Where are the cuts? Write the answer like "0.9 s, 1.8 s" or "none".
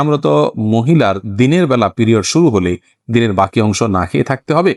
none